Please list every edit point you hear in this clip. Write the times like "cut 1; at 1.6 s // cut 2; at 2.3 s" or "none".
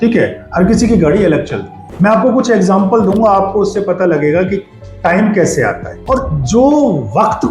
cut 1; at 1.8 s // cut 2; at 5.9 s